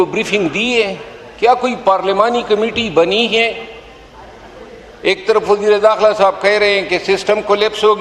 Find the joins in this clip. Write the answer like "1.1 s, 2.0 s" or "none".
none